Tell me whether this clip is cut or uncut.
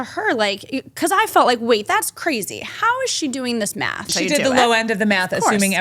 cut